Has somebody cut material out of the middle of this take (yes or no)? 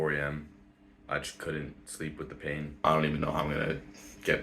yes